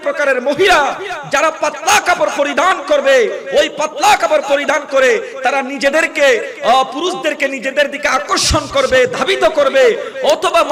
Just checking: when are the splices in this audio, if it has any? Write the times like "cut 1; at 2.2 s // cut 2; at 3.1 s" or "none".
none